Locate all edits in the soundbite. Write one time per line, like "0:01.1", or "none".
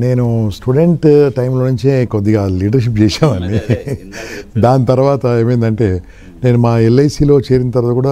none